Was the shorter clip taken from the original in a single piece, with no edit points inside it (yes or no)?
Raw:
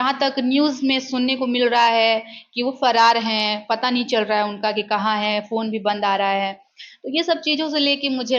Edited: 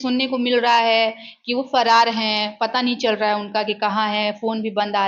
yes